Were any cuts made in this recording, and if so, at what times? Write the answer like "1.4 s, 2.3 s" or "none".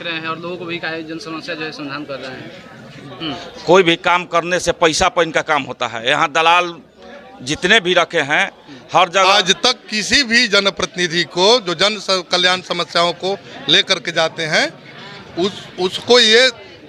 3.1 s, 9.3 s